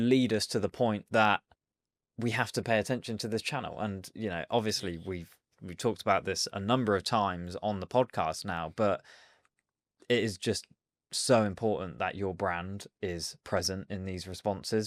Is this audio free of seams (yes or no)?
yes